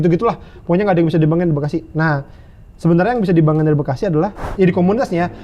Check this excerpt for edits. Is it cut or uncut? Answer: cut